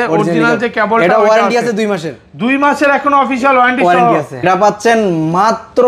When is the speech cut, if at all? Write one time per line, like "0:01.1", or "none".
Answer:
0:04.4